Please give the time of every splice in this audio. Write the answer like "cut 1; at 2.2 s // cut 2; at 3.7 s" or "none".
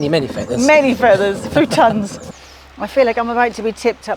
none